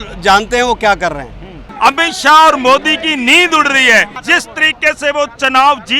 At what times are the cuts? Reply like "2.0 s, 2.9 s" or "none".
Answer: 1.6 s, 4.2 s

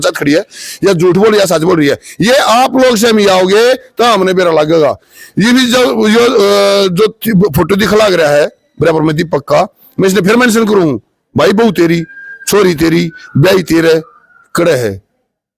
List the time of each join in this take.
none

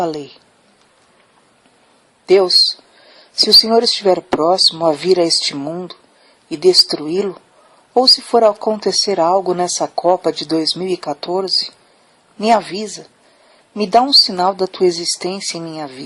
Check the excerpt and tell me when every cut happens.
11.5 s

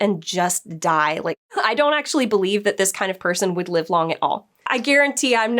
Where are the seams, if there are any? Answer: 1.4 s, 4.5 s

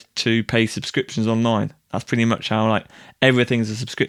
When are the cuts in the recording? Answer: none

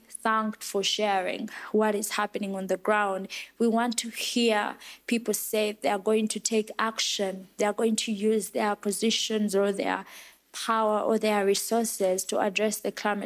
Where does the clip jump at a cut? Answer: none

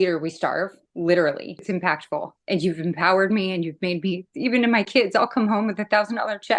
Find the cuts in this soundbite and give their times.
1.7 s

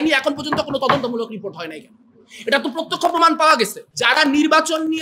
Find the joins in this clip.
3.9 s

